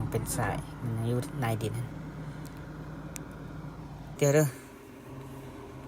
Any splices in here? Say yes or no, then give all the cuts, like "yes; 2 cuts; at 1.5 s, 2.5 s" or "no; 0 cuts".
yes; 1 cut; at 4.1 s